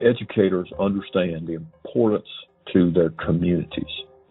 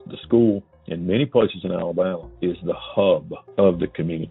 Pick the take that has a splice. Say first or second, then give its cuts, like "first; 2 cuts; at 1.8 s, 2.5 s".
second; 2 cuts; at 2.3 s, 3.4 s